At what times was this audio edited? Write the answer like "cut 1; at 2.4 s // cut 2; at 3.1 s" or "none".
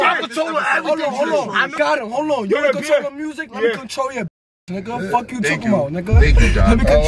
none